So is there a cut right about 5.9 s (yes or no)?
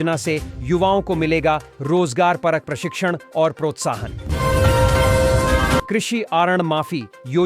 yes